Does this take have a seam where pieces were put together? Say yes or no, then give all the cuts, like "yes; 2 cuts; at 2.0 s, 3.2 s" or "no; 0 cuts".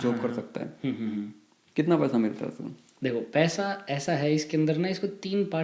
no; 0 cuts